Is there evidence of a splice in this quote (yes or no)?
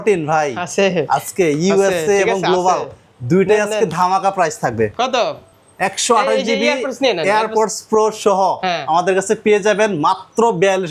no